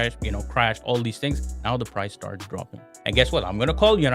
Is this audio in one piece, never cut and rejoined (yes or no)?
no